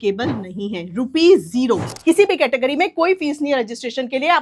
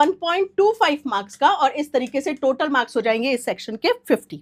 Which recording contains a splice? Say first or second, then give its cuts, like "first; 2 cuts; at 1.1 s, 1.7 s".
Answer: first; 1 cut; at 1.9 s